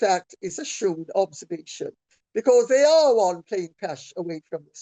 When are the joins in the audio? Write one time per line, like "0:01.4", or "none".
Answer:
none